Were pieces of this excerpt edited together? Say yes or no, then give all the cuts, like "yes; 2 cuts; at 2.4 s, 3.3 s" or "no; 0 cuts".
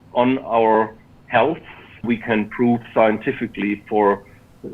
yes; 1 cut; at 2.1 s